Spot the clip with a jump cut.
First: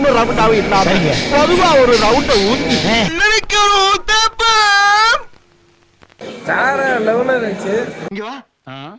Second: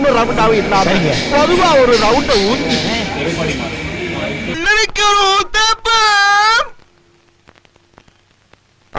first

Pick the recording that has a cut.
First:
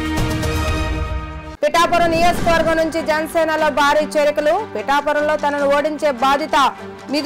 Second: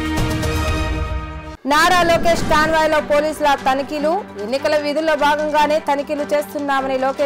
first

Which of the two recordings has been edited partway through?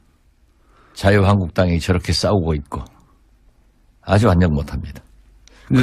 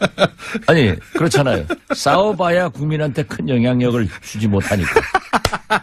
first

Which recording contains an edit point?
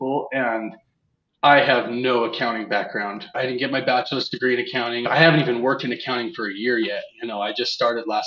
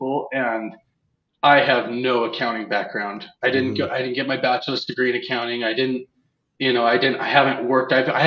first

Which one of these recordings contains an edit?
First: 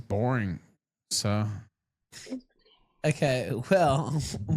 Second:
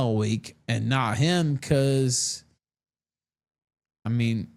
first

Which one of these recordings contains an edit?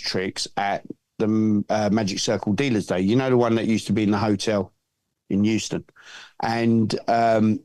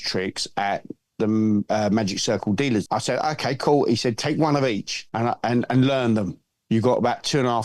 second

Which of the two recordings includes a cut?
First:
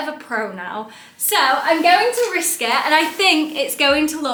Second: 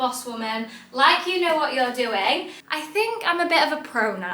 second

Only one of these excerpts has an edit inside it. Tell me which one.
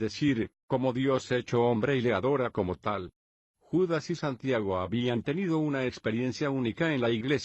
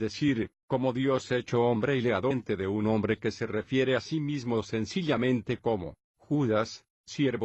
first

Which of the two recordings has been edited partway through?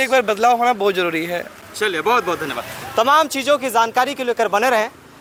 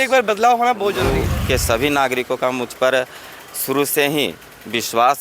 second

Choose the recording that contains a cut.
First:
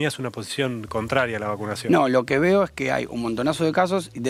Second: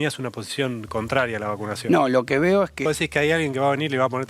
second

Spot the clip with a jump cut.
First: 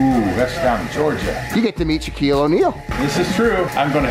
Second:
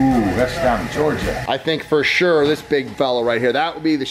second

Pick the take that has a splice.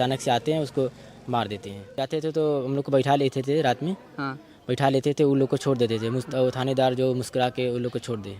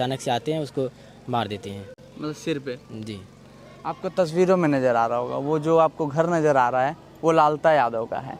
first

